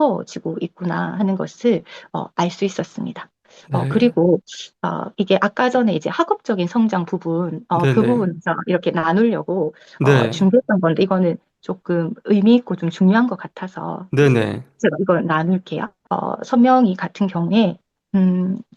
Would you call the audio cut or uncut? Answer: uncut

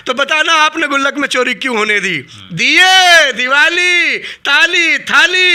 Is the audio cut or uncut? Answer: uncut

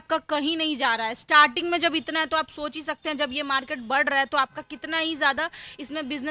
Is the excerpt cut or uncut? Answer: uncut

